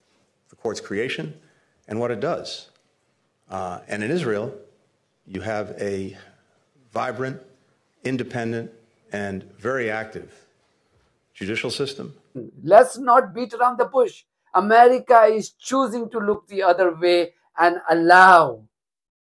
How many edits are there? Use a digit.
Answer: 1